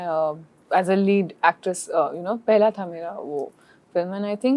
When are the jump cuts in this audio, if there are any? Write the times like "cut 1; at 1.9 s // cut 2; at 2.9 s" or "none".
none

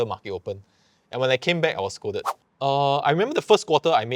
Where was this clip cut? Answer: cut 1; at 2.3 s

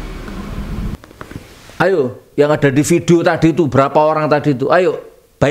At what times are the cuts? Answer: cut 1; at 1.0 s

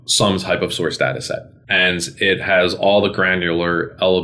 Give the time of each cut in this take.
cut 1; at 1.6 s

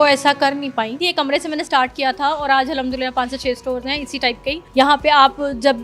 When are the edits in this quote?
cut 1; at 1.0 s // cut 2; at 4.6 s

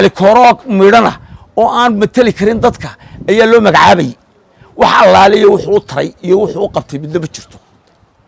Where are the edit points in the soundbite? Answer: none

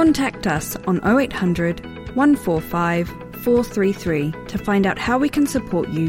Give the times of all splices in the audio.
none

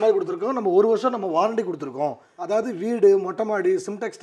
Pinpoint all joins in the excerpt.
cut 1; at 2.3 s

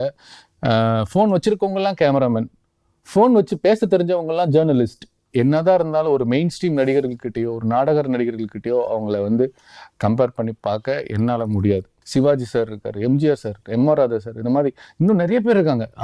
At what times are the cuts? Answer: cut 1; at 5.2 s // cut 2; at 12.0 s

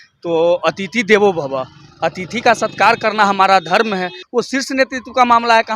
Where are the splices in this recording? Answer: cut 1; at 4.2 s

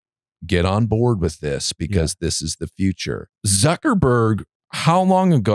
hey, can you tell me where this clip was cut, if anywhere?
cut 1; at 3.3 s

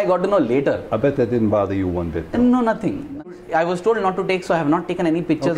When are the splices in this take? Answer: cut 1; at 3.2 s

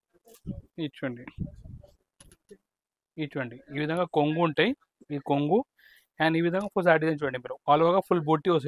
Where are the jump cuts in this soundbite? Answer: none

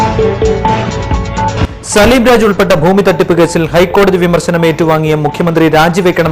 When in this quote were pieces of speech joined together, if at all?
cut 1; at 1.1 s

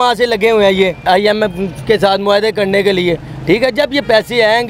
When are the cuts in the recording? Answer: cut 1; at 1.1 s

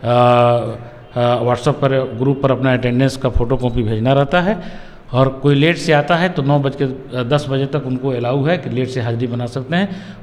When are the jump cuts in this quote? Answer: none

